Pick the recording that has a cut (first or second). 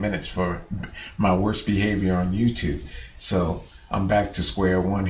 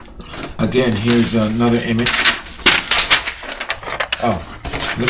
second